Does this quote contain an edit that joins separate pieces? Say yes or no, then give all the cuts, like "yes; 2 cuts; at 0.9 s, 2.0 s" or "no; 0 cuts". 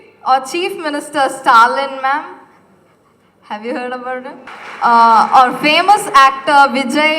yes; 1 cut; at 4.4 s